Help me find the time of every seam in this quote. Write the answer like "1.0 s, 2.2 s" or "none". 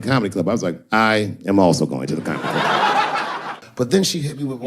3.6 s